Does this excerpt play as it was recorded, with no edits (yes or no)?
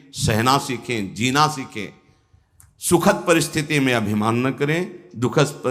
yes